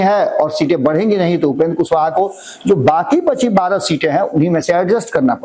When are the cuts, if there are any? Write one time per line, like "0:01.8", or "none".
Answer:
none